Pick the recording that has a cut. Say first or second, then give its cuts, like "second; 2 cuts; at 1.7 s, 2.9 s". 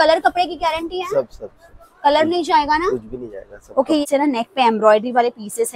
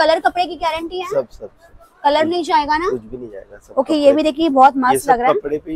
first; 1 cut; at 4.0 s